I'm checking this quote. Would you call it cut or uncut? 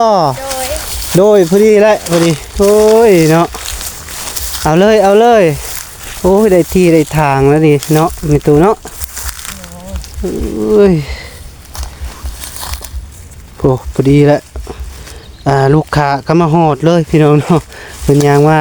uncut